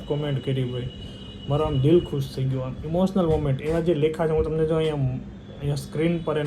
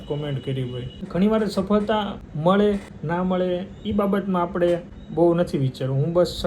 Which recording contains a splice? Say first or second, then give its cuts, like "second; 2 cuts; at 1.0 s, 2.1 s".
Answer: second; 4 cuts; at 0.9 s, 2.2 s, 2.9 s, 5.0 s